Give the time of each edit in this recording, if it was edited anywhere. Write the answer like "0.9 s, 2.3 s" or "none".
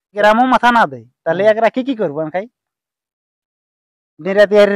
none

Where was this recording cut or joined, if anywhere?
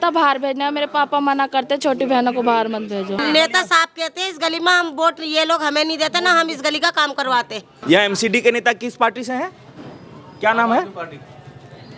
3.2 s, 7.7 s

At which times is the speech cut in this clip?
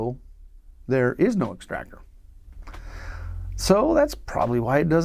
none

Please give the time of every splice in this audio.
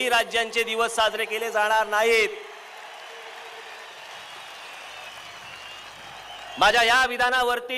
none

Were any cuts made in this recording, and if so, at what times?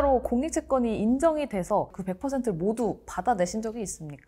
1.9 s

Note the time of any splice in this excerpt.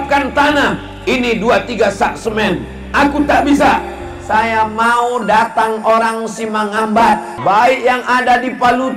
7.3 s

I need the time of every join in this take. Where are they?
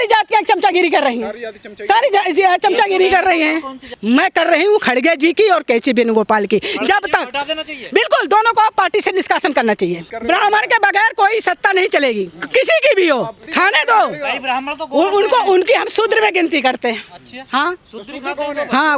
3.9 s, 10.1 s, 13.4 s

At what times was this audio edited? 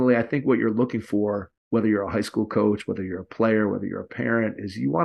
1.5 s

